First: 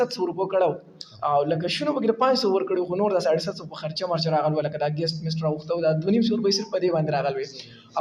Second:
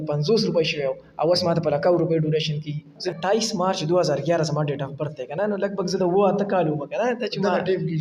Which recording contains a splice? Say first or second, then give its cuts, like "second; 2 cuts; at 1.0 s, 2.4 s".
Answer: second; 1 cut; at 3.0 s